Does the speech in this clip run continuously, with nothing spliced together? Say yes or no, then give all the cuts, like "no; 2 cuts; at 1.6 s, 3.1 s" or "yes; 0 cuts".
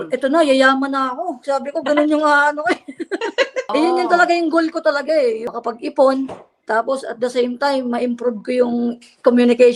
no; 2 cuts; at 3.7 s, 5.5 s